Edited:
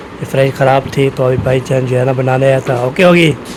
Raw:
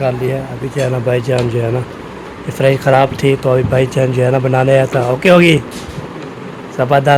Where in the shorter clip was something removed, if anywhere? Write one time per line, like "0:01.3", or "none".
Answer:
none